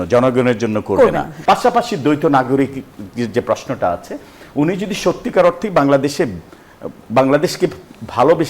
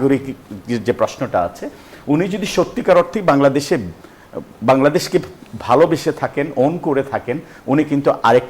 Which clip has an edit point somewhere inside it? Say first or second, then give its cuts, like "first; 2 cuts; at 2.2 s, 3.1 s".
first; 1 cut; at 1.3 s